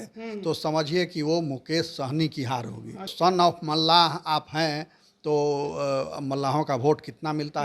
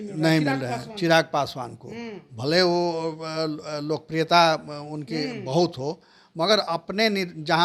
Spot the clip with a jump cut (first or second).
first